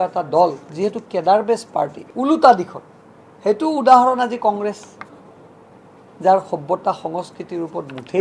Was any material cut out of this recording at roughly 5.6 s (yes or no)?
no